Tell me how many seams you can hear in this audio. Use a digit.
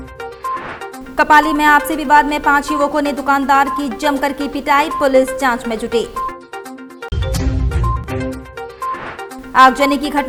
0